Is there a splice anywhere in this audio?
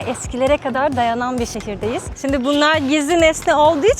yes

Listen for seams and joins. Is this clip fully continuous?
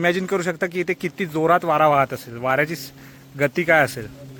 yes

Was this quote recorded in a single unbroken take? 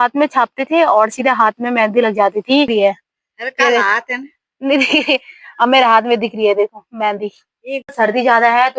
no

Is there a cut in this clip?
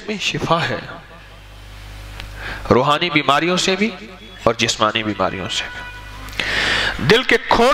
no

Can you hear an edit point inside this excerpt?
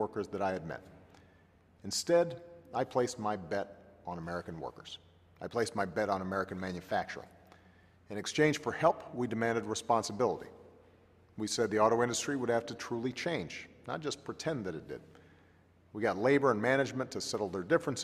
no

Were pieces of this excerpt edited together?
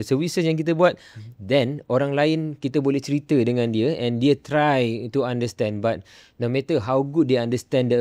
no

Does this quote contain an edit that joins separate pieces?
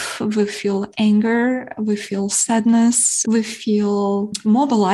no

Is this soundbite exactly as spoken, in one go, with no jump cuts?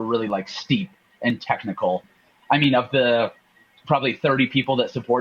no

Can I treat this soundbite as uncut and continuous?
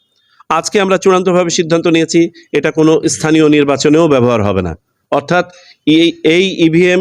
yes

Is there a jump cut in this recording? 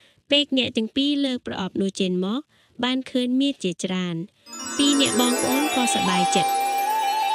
yes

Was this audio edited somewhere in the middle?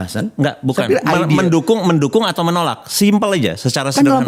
no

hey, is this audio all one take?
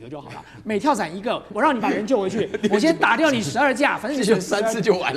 no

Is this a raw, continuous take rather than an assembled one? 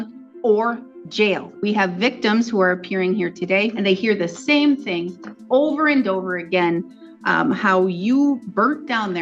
no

